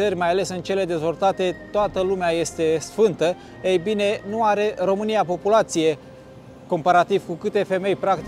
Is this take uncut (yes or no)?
yes